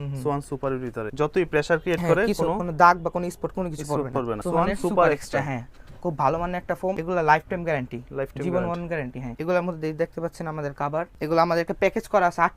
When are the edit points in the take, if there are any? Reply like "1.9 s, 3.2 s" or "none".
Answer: 1.1 s, 4.4 s, 7.0 s, 9.3 s, 11.1 s